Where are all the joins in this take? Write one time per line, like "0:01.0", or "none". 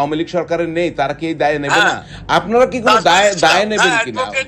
0:02.1